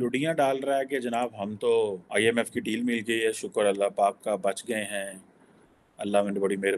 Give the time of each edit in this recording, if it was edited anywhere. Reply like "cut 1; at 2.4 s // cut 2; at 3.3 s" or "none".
cut 1; at 2.0 s